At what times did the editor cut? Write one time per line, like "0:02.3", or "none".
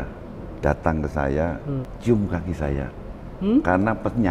0:01.9